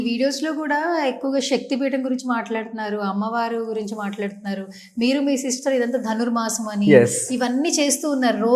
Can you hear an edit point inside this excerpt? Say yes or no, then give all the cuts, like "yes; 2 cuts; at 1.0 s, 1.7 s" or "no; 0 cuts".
no; 0 cuts